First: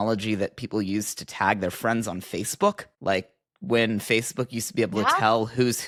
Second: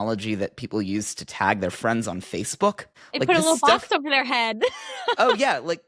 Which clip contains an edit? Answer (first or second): second